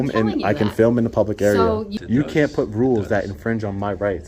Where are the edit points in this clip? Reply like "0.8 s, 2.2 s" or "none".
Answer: 1.9 s